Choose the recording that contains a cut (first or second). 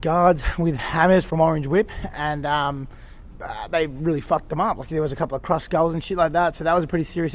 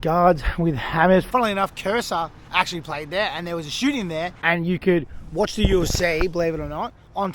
second